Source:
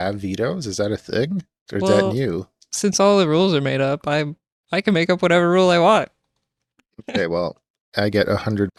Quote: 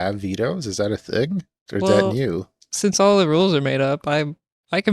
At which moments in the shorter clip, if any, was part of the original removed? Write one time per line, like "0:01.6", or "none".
none